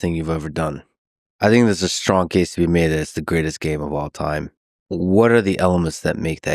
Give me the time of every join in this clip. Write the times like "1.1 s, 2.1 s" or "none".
none